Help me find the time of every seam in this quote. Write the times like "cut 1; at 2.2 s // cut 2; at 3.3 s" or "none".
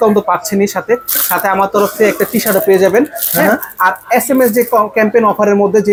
none